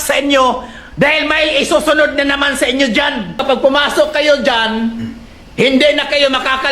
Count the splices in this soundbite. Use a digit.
1